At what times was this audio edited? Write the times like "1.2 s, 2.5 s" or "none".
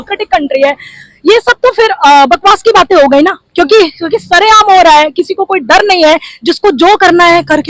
none